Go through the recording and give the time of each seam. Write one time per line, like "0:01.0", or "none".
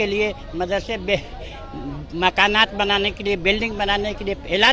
none